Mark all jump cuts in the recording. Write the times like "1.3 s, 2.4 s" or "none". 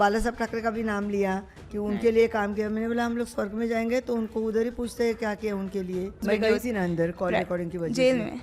6.2 s